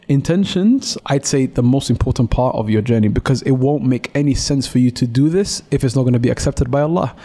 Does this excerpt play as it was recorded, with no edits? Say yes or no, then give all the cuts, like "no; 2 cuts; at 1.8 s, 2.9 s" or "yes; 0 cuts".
no; 1 cut; at 0.9 s